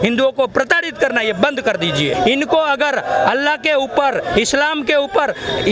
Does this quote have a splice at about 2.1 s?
yes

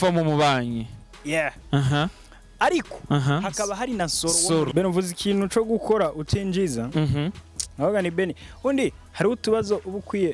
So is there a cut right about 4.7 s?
yes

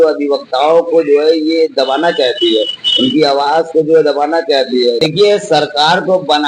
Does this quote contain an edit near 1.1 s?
no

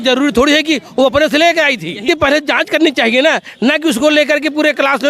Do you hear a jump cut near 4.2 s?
no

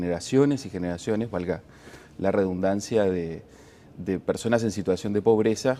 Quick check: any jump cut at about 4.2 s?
yes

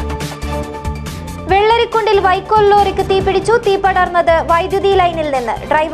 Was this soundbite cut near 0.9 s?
yes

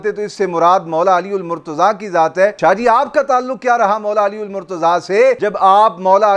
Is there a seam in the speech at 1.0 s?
no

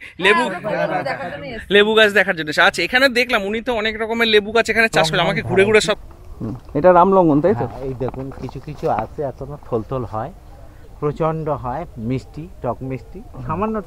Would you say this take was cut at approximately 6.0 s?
yes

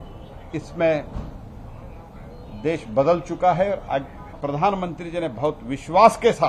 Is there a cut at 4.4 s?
yes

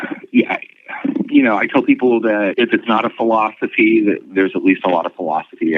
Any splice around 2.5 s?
yes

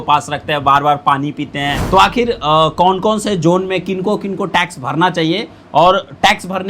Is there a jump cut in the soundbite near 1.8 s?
yes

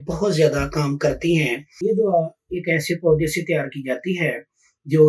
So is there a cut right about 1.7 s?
yes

